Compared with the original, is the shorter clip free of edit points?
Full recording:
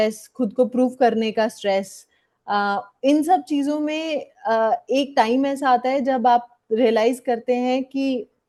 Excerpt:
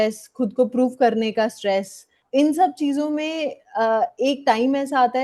no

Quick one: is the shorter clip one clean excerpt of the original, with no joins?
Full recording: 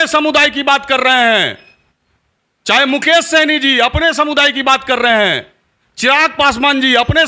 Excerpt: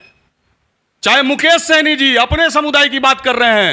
yes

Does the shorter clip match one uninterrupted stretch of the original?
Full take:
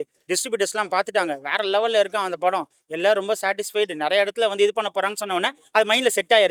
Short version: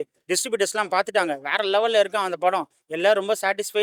yes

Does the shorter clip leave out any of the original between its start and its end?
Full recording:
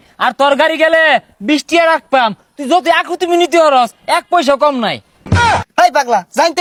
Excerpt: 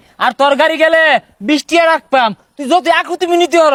no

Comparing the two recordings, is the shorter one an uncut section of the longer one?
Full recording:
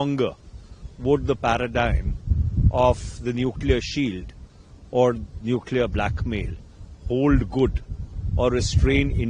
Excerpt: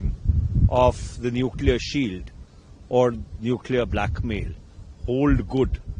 yes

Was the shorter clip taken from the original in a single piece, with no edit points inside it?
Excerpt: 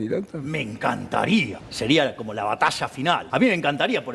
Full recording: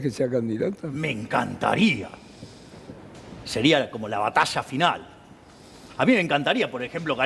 no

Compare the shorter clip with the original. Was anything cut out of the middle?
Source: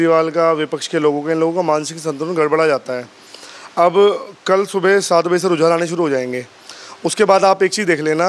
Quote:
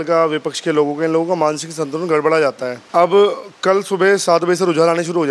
yes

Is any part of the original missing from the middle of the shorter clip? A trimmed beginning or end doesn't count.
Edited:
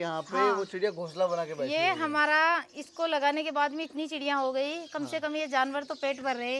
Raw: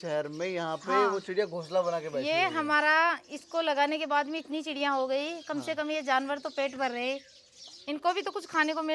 no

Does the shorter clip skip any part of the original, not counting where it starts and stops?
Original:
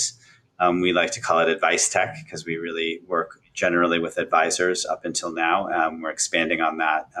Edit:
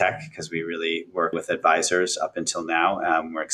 yes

